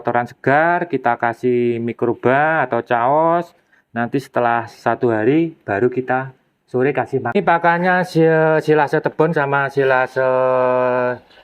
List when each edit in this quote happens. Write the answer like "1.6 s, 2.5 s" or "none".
7.4 s